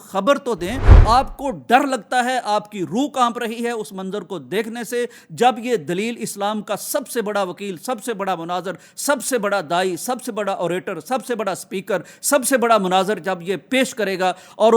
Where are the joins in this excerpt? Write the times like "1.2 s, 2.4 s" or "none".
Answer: 0.9 s